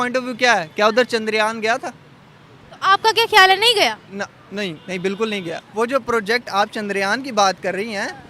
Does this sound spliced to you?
yes; 1 cut; at 5.6 s

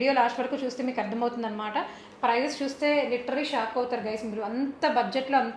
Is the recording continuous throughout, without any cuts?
yes; 0 cuts

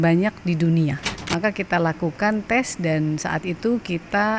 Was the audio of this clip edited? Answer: yes; 1 cut; at 1.0 s

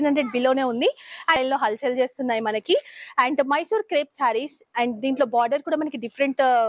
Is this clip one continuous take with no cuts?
no; 1 cut; at 1.4 s

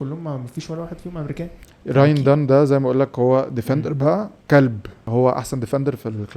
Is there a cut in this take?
yes; 3 cuts; at 1.6 s, 4.3 s, 5.1 s

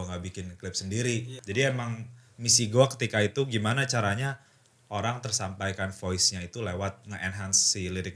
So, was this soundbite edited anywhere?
yes; 2 cuts; at 1.3 s, 7.1 s

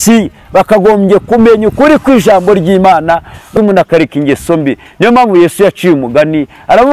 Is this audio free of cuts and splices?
no; 1 cut; at 3.5 s

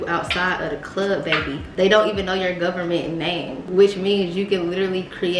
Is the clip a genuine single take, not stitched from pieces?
yes; 0 cuts

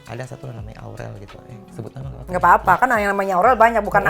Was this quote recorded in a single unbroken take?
yes; 0 cuts

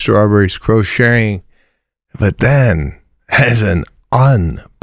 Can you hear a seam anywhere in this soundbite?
no; 0 cuts

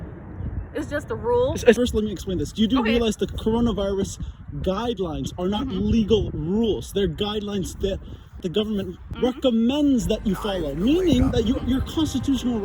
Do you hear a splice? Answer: yes; 2 cuts; at 1.8 s, 8.6 s

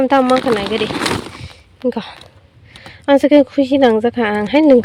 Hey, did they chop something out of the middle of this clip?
no; 0 cuts

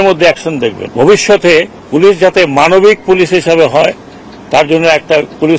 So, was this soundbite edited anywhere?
yes; 2 cuts; at 0.8 s, 1.8 s

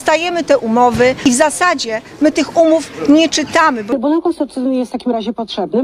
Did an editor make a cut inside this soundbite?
yes; 2 cuts; at 1.2 s, 3.9 s

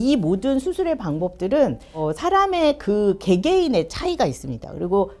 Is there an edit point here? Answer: no; 0 cuts

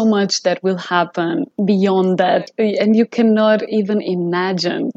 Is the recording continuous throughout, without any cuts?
no; 2 cuts; at 1.5 s, 2.5 s

